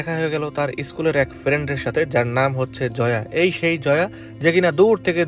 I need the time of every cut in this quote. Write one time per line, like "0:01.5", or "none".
none